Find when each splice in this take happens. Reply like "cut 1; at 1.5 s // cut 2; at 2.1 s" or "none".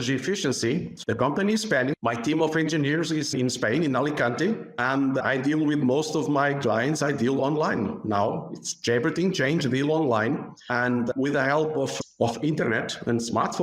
cut 1; at 0.9 s // cut 2; at 4.7 s // cut 3; at 10.6 s